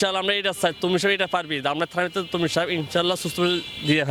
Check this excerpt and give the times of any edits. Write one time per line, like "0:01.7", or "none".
none